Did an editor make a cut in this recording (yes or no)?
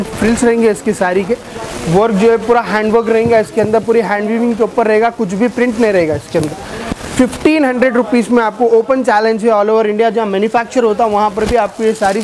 no